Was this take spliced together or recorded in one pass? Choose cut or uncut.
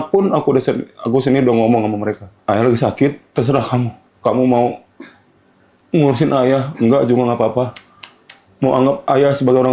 cut